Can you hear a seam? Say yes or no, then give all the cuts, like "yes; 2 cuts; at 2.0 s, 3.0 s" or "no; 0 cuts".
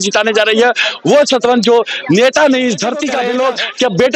yes; 1 cut; at 3.1 s